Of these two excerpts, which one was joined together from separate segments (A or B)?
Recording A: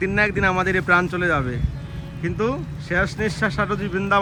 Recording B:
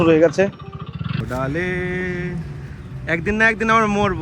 B